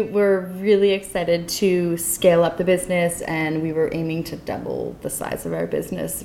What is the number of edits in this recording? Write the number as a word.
zero